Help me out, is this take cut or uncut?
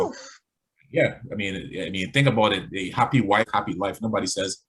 cut